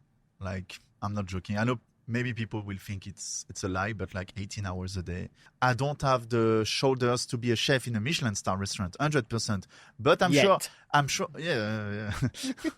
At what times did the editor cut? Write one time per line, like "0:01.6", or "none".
0:05.4